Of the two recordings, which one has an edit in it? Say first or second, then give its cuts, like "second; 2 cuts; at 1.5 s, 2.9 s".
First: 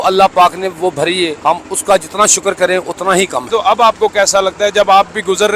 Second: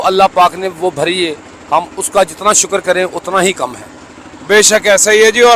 first; 2 cuts; at 1.4 s, 3.5 s